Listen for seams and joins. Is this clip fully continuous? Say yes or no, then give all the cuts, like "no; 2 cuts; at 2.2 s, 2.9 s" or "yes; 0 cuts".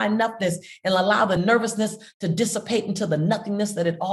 no; 1 cut; at 1.4 s